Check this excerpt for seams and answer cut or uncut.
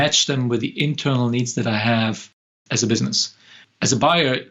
cut